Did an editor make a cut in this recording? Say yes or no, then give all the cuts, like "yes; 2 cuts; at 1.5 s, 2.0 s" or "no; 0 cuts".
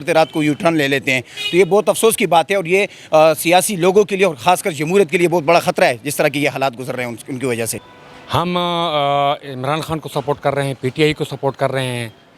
no; 0 cuts